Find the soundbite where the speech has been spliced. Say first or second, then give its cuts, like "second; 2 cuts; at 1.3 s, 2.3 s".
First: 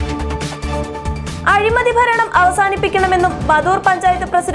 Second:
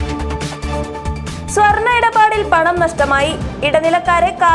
first; 1 cut; at 1.0 s